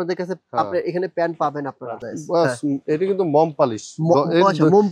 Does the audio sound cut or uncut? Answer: cut